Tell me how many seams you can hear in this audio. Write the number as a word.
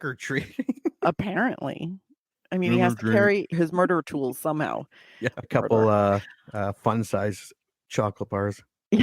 two